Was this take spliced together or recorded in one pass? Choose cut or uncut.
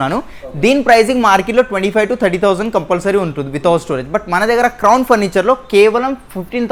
uncut